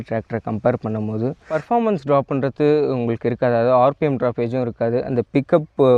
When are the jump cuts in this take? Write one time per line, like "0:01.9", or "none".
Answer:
0:01.4